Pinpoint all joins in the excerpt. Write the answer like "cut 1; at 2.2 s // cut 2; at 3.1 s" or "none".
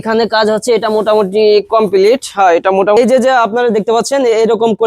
cut 1; at 3.0 s